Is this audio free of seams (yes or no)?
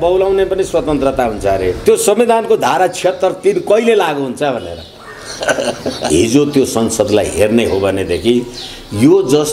no